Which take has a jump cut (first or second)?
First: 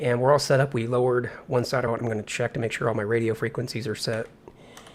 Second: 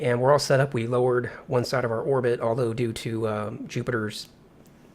second